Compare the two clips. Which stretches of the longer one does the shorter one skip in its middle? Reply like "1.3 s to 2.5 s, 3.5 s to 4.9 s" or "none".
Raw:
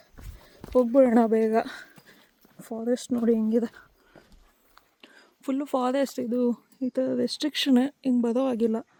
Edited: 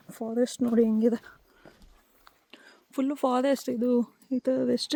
none